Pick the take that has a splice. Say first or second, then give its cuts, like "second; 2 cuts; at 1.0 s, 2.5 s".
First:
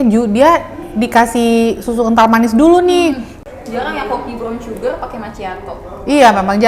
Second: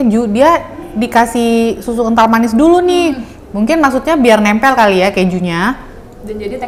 first; 1 cut; at 3.4 s